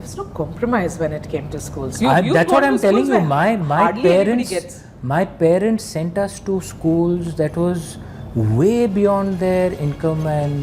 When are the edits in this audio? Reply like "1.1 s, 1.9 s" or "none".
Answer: none